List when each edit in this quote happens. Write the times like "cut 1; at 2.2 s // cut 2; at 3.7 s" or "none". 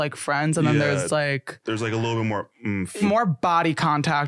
cut 1; at 3.0 s